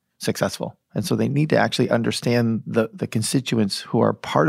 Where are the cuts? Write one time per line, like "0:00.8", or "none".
0:02.9